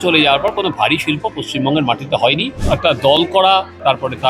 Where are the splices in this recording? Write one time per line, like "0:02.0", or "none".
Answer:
0:02.6

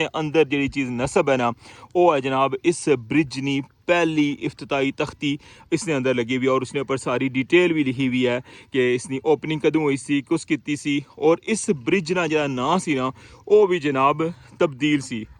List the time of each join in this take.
none

